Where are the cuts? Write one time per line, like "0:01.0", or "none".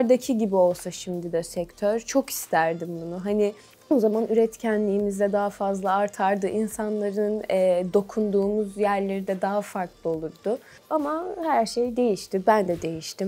none